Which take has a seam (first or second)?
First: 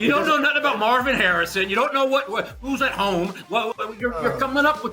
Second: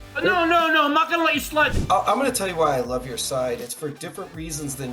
second